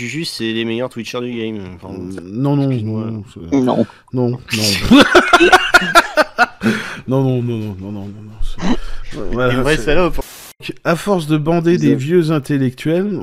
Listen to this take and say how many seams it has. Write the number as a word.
zero